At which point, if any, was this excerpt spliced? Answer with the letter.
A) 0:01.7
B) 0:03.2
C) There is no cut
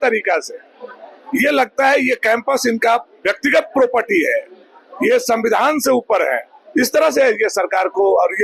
C